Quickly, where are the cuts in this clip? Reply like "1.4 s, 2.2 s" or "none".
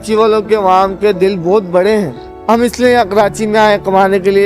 2.3 s

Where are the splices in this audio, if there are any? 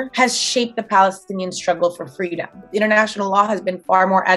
2.7 s

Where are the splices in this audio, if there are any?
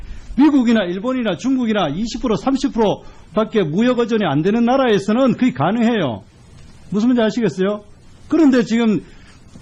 5.4 s

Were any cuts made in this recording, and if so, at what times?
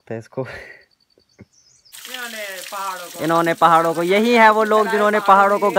2.0 s

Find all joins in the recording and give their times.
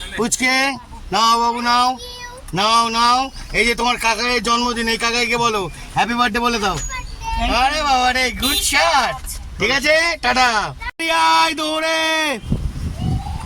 10.9 s

